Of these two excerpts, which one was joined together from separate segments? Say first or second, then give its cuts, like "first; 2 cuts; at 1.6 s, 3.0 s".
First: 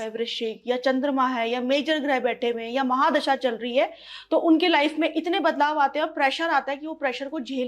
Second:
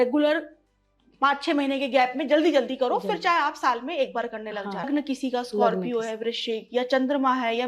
second; 1 cut; at 4.9 s